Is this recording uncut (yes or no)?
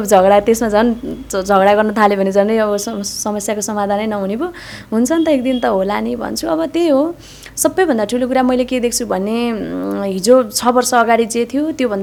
yes